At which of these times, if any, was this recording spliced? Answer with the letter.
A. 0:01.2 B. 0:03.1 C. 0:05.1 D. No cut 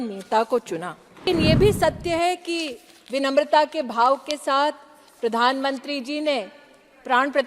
A